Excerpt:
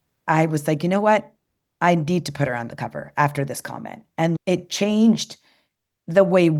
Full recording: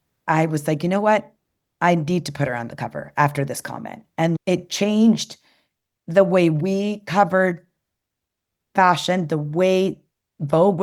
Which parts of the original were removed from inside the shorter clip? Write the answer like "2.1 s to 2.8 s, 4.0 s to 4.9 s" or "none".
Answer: none